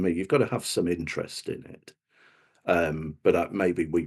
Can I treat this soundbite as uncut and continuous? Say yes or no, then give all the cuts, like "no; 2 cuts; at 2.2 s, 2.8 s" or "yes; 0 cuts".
yes; 0 cuts